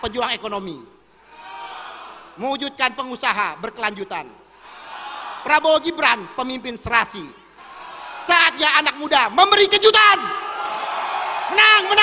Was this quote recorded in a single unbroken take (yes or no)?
yes